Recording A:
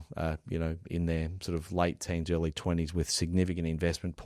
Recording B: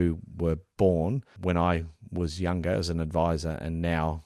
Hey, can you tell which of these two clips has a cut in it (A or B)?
B